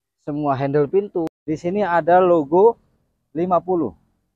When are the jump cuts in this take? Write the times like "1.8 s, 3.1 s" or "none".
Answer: 1.4 s